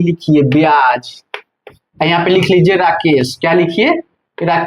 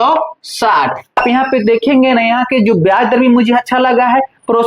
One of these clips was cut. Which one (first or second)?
second